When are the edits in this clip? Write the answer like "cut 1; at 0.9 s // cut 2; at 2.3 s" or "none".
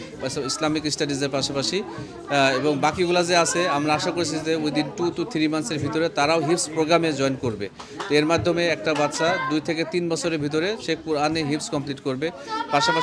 none

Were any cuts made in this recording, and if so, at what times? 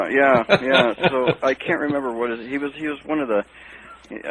cut 1; at 3.0 s

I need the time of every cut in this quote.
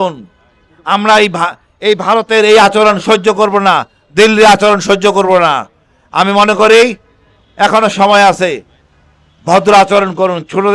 none

